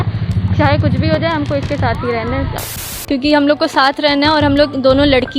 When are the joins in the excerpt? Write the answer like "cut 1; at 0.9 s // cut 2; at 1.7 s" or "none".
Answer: cut 1; at 2.5 s